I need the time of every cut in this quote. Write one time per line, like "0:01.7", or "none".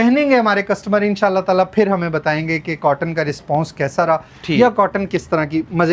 none